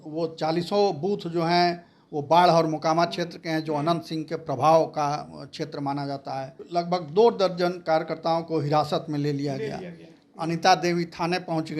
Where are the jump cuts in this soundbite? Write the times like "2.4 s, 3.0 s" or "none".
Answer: 6.6 s

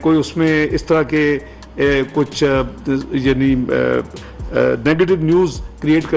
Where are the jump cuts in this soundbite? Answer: none

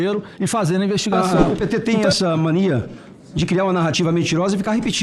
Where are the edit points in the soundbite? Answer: 1.1 s

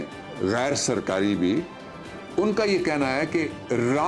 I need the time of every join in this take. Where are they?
none

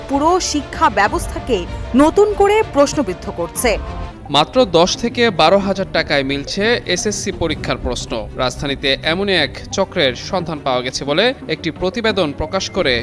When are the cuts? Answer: 4.0 s

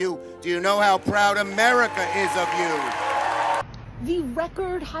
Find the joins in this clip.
3.6 s

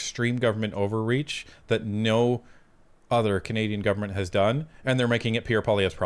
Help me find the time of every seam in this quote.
none

